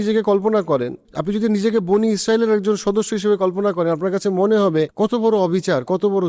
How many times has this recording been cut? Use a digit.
2